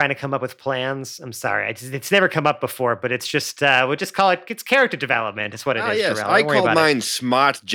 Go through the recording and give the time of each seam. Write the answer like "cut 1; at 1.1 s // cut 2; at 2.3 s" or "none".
cut 1; at 6.3 s